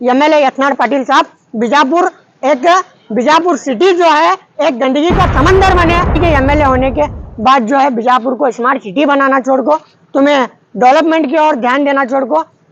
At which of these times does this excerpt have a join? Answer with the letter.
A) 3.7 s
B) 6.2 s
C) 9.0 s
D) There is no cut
B